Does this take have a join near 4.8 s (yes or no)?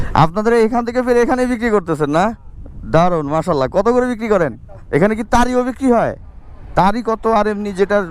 yes